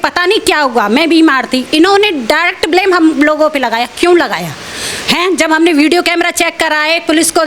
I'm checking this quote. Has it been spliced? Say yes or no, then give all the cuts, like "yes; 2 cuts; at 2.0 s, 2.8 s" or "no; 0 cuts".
no; 0 cuts